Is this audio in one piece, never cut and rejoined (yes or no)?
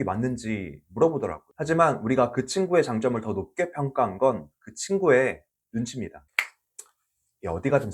no